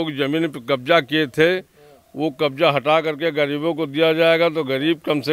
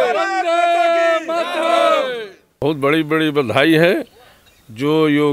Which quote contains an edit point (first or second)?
second